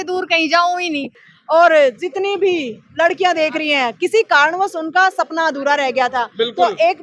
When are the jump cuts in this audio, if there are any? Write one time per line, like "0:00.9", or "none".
0:01.2